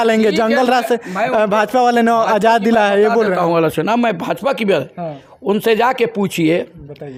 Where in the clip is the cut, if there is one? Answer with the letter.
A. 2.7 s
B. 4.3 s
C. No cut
C